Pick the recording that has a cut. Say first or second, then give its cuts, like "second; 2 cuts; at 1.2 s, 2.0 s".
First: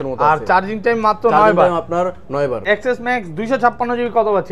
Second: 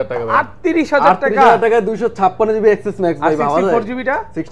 first; 1 cut; at 2.6 s